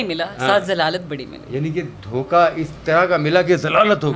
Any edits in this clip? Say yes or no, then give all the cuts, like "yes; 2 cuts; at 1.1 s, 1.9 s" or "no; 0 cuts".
no; 0 cuts